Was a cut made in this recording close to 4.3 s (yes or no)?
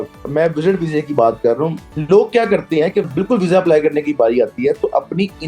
no